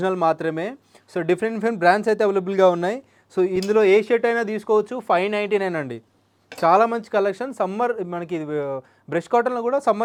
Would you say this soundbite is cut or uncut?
uncut